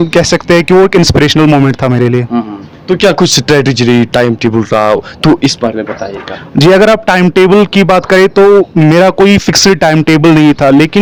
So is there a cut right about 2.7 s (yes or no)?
no